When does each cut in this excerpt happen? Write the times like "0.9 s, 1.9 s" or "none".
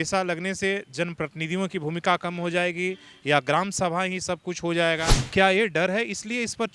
5.2 s